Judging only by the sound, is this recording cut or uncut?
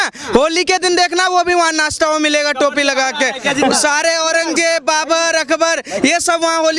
uncut